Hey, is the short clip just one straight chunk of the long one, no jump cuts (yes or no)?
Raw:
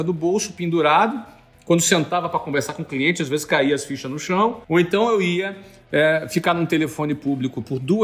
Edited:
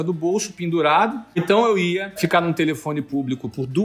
no